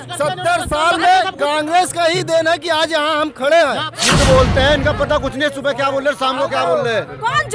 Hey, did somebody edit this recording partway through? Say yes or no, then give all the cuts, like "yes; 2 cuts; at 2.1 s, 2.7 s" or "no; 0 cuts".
yes; 1 cut; at 4.0 s